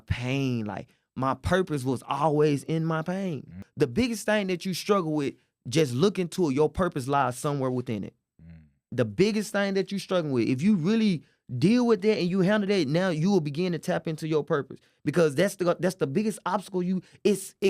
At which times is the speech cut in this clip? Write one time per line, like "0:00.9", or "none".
0:03.6